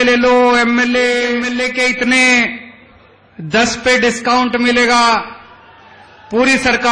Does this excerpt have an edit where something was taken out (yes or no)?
yes